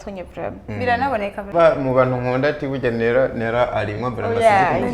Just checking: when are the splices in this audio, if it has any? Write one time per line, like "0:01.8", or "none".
0:01.5